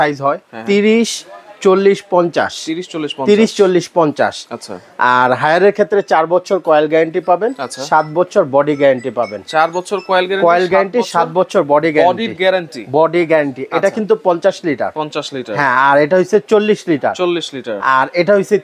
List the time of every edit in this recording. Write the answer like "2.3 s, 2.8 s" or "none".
none